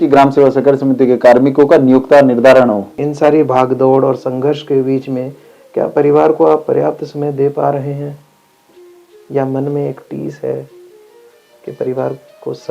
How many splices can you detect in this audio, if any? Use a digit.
1